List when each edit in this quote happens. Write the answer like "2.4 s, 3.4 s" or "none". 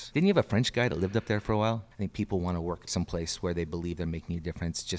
1.9 s, 2.9 s